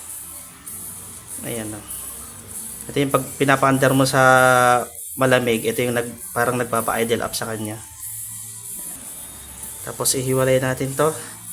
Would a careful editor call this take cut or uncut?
cut